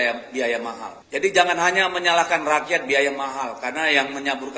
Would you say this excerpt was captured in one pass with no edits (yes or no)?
no